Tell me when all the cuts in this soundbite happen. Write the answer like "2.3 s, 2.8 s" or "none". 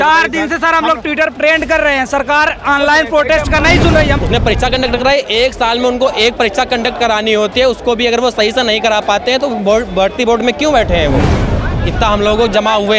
4.2 s, 11.5 s